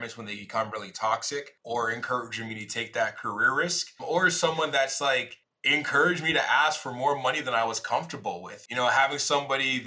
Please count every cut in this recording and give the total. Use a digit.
1